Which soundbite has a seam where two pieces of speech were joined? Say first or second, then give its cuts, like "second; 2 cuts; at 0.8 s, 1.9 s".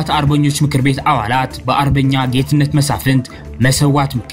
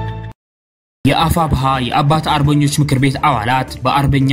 second; 1 cut; at 1.0 s